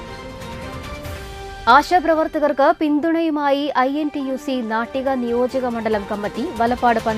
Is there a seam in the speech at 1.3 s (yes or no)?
yes